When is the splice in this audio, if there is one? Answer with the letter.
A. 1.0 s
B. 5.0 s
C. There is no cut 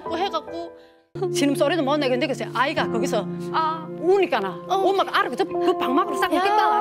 A